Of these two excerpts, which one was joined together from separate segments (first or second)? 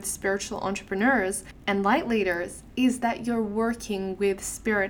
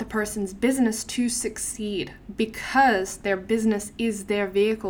first